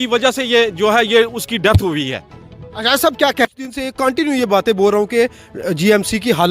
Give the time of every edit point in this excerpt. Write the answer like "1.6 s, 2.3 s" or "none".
3.7 s